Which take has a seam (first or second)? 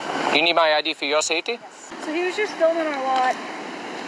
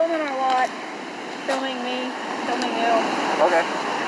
first